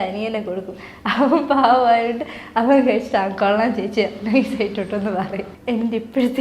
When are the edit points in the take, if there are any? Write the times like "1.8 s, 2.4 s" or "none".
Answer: 5.5 s